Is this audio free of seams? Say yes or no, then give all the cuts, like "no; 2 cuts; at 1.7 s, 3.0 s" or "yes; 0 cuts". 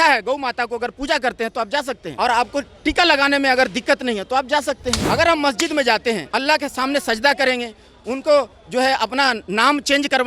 no; 3 cuts; at 2.1 s, 4.9 s, 6.3 s